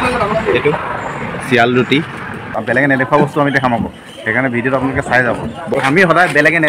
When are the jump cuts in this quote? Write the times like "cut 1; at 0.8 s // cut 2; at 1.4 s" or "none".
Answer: cut 1; at 2.5 s // cut 2; at 5.7 s